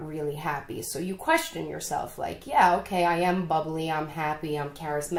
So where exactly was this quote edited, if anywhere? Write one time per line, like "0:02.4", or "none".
none

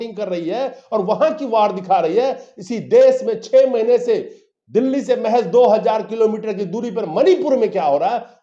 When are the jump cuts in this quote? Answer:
none

